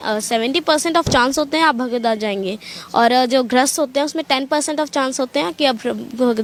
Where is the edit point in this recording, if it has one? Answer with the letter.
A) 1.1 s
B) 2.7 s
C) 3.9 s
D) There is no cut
D